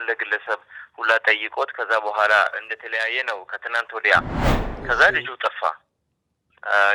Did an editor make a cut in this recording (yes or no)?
no